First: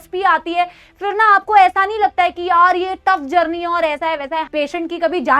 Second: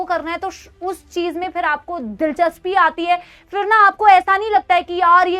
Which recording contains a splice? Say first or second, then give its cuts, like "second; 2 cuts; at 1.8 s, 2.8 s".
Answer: first; 1 cut; at 4.5 s